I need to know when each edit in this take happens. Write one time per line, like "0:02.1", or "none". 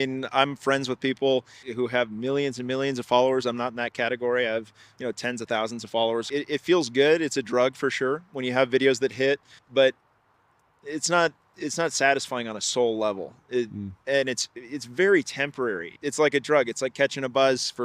0:01.6
0:06.3
0:09.6
0:15.9